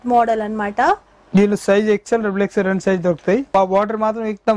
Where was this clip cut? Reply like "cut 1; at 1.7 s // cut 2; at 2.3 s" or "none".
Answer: cut 1; at 3.5 s